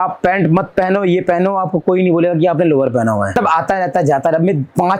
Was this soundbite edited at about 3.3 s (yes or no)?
yes